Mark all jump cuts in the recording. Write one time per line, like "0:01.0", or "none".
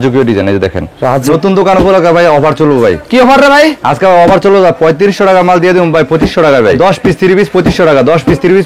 0:01.3
0:06.8